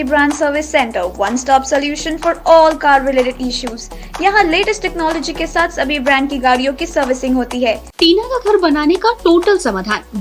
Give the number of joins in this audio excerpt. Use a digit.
1